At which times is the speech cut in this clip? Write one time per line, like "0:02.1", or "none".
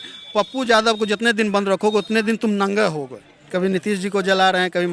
0:03.5